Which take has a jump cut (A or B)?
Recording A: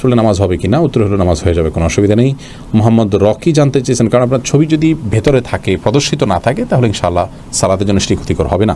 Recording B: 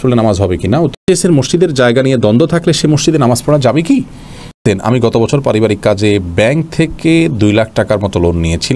B